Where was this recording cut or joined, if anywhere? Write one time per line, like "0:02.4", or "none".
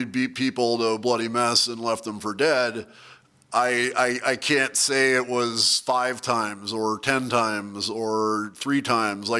none